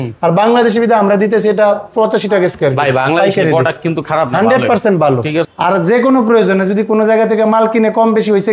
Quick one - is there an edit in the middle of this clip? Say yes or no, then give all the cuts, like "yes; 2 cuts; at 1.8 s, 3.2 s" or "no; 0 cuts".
yes; 1 cut; at 5.5 s